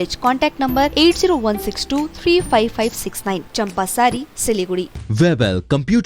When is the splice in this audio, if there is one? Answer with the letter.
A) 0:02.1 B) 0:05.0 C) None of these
B